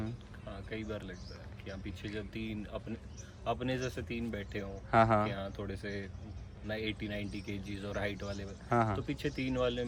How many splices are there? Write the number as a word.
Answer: zero